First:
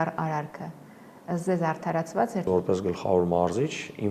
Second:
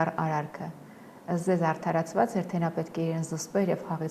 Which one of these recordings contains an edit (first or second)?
first